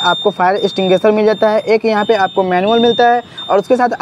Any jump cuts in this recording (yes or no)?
no